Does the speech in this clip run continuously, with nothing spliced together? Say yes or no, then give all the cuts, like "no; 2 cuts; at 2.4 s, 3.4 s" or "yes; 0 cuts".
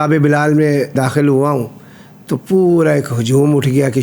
no; 1 cut; at 1.0 s